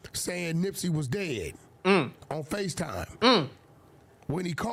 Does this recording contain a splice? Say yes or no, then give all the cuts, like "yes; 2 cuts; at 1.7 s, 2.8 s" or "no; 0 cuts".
no; 0 cuts